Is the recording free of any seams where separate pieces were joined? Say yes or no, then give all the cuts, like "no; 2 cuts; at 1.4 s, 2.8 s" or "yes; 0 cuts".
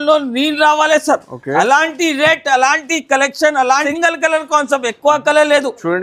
no; 1 cut; at 3.9 s